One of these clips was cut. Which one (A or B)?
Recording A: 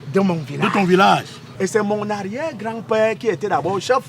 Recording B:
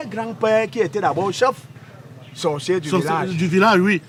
A